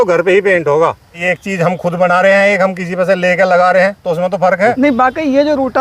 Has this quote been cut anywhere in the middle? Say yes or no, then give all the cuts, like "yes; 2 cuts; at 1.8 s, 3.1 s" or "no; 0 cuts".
yes; 2 cuts; at 1.3 s, 4.8 s